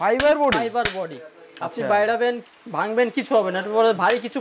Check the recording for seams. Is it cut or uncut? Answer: uncut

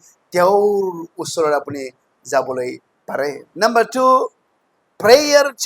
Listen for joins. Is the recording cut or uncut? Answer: cut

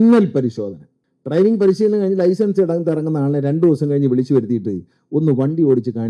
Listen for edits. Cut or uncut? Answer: uncut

